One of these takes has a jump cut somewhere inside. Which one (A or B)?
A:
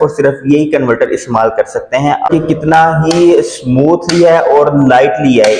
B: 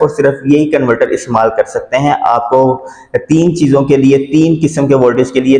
A